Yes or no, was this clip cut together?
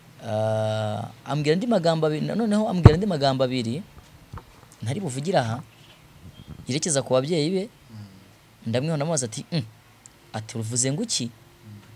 no